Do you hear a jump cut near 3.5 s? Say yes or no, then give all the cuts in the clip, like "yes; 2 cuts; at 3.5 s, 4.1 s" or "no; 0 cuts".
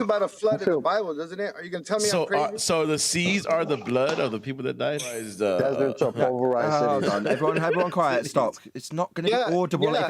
no; 1 cut; at 5.2 s